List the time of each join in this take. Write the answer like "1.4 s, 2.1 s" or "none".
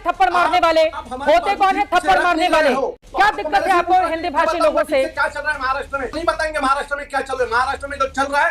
3.0 s, 6.2 s